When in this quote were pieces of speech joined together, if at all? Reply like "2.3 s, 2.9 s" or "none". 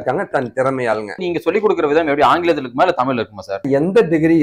1.2 s, 3.6 s